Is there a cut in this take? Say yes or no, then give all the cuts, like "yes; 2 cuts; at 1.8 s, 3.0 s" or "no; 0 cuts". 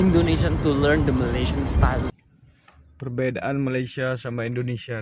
yes; 1 cut; at 2.1 s